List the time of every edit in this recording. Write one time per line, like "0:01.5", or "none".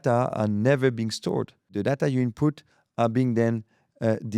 0:01.8